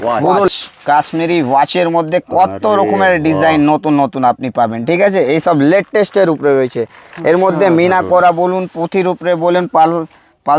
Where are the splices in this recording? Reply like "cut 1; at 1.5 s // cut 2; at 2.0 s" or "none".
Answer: none